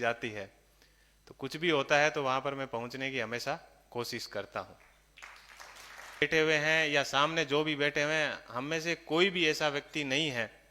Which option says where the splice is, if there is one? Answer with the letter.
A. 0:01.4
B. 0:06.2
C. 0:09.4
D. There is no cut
B